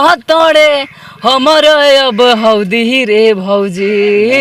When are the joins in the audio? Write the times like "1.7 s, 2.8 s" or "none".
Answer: none